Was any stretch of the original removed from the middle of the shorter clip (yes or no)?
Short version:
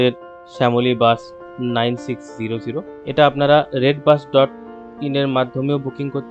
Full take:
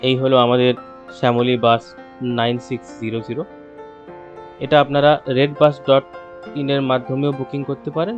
yes